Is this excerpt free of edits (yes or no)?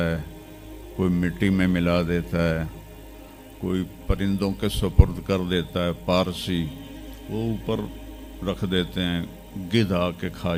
yes